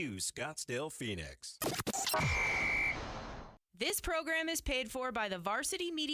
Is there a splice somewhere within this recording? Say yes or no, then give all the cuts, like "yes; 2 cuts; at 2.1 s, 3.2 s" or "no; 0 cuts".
yes; 1 cut; at 3.5 s